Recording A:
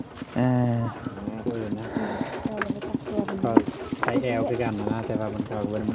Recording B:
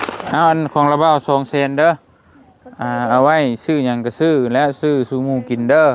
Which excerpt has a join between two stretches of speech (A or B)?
A